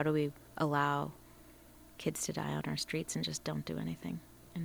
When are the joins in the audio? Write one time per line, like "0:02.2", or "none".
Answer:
none